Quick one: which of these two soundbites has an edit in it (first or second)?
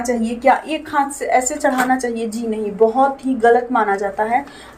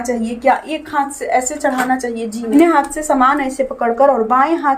second